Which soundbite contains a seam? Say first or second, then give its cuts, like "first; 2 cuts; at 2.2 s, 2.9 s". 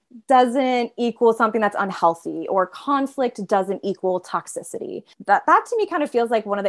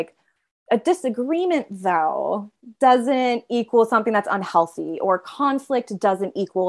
first; 1 cut; at 5.1 s